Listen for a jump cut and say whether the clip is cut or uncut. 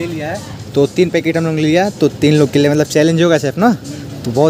uncut